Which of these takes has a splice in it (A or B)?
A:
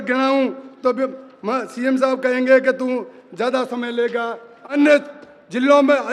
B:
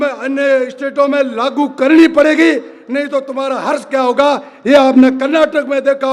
A